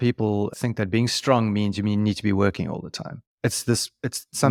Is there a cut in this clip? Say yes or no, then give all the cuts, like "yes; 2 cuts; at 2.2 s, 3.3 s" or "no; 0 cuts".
no; 0 cuts